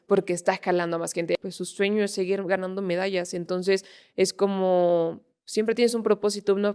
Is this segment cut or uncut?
cut